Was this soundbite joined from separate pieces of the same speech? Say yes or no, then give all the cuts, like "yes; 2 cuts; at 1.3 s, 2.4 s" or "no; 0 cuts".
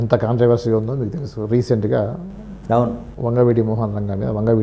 no; 0 cuts